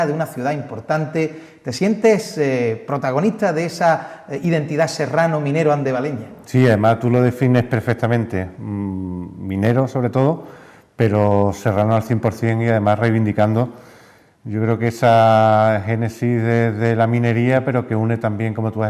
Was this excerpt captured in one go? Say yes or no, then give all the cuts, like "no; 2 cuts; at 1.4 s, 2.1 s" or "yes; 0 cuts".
yes; 0 cuts